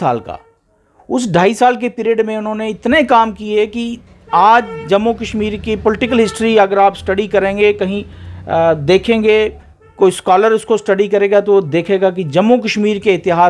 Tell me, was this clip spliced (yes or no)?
no